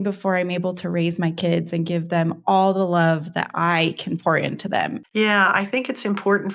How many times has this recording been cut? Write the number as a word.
one